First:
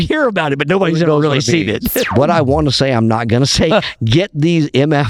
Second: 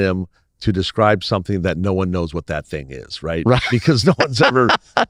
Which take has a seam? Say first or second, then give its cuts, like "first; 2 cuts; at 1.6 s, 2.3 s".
first; 1 cut; at 2.1 s